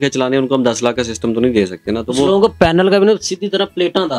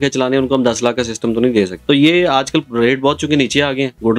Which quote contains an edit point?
second; 1 cut; at 1.8 s

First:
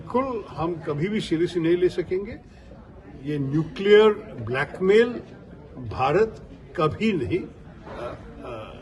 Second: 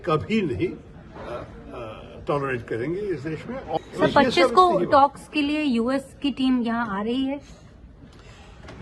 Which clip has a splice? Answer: second; 1 cut; at 3.8 s

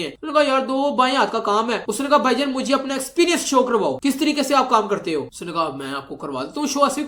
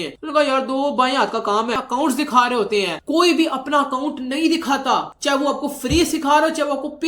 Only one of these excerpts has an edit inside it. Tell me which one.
second; 1 cut; at 1.8 s

